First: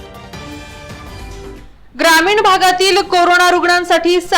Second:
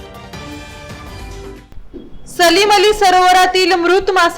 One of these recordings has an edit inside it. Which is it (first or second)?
first